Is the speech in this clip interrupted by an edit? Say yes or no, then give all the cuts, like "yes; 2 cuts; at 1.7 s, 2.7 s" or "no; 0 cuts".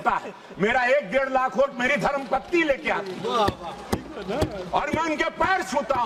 no; 0 cuts